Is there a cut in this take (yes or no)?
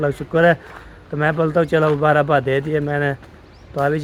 no